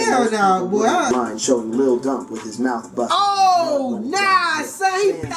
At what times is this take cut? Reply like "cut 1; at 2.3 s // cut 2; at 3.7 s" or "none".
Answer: cut 1; at 1.1 s